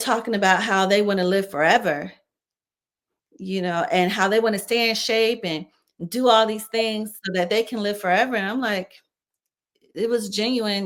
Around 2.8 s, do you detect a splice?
no; 0 cuts

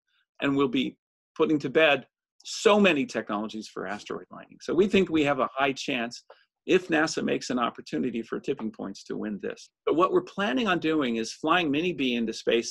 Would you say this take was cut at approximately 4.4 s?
no; 1 cut; at 9.7 s

